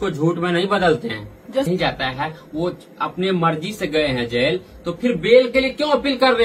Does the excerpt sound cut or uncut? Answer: cut